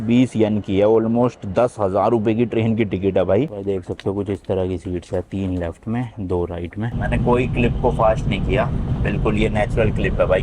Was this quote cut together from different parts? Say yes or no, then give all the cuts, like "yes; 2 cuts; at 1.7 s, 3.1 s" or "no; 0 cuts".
yes; 2 cuts; at 3.6 s, 6.9 s